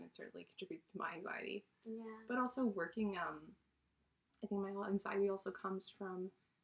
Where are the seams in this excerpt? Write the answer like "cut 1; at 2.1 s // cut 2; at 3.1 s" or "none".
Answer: none